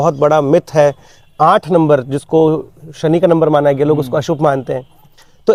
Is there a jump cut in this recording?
no; 0 cuts

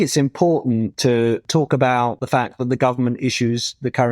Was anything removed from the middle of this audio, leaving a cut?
yes; 2 cuts; at 1.2 s, 2.2 s

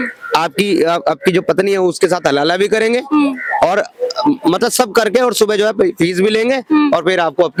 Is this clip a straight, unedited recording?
yes; 0 cuts

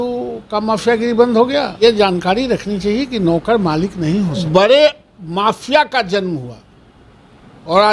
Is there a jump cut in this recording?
yes; 2 cuts; at 1.8 s, 4.4 s

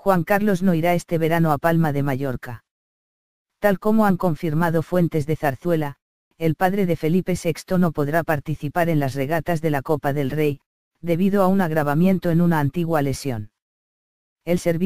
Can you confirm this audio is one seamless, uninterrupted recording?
yes; 0 cuts

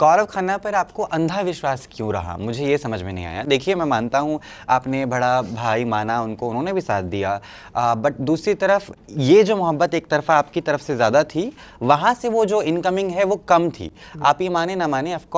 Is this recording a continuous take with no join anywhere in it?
yes; 0 cuts

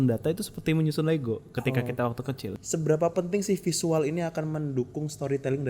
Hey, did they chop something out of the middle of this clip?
yes; 1 cut; at 2.5 s

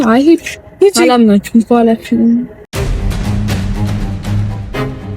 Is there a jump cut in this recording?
yes; 1 cut; at 2.6 s

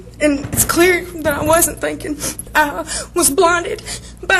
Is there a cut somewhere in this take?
yes; 1 cut; at 2.4 s

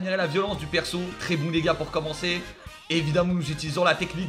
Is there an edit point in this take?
yes; 1 cut; at 1.2 s

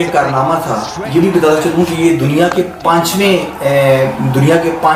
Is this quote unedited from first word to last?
yes; 0 cuts

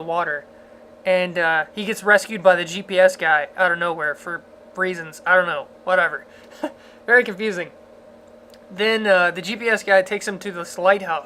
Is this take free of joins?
no; 1 cut; at 2.8 s

